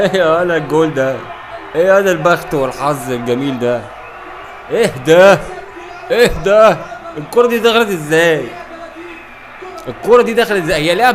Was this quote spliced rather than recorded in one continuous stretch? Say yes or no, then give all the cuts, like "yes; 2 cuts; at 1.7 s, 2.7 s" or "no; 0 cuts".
no; 0 cuts